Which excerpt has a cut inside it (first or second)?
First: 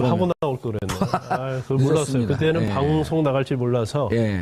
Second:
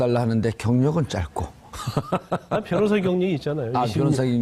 second